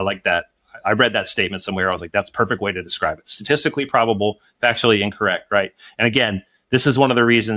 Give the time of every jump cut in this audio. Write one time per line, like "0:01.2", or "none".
none